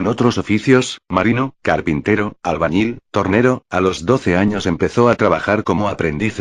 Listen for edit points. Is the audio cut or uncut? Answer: cut